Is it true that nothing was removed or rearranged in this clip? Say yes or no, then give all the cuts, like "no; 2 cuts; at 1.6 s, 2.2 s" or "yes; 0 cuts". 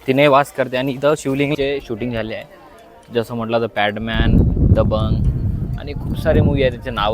no; 1 cut; at 1.6 s